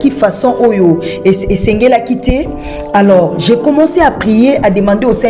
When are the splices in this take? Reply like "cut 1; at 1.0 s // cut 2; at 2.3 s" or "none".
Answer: none